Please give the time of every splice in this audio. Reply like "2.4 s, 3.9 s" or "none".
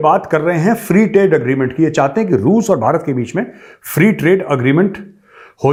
none